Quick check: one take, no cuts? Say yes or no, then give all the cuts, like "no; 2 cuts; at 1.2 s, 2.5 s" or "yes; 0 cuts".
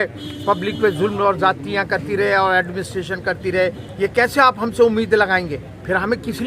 no; 1 cut; at 3.8 s